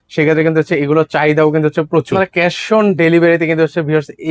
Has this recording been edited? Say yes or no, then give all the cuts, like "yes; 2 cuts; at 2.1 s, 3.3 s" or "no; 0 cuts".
yes; 1 cut; at 2.1 s